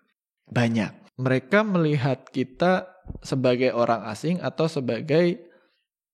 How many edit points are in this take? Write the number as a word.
one